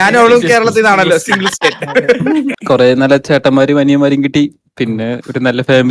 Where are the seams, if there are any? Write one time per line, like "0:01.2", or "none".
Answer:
0:02.5